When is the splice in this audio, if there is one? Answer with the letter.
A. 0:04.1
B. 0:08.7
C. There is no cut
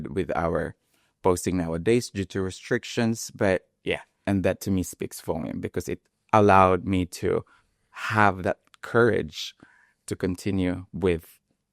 A